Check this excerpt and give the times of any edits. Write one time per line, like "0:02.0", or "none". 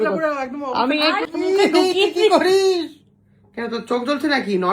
0:01.2